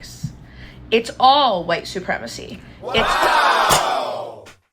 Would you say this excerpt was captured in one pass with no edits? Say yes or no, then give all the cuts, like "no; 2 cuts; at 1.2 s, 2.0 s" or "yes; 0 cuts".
no; 1 cut; at 3.0 s